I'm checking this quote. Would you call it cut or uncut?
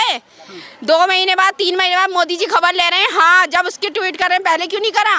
uncut